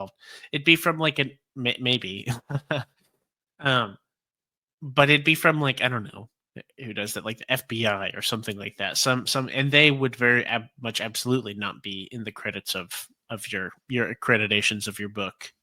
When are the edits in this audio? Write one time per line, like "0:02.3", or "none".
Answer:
none